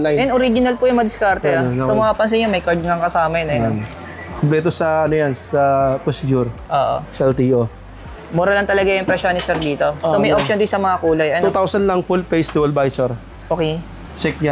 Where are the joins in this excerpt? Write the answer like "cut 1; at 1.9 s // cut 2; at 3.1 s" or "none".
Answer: cut 1; at 11.4 s